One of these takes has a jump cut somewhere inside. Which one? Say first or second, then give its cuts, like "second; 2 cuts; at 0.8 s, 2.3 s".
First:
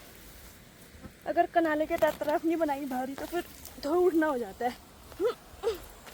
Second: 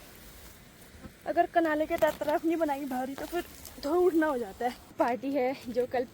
second; 1 cut; at 4.9 s